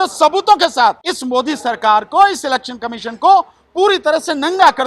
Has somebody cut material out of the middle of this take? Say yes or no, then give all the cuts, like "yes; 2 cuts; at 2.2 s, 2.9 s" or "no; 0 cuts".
yes; 1 cut; at 1.1 s